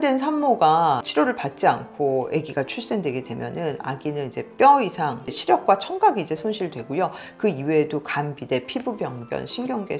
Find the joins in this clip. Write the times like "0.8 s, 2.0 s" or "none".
1.1 s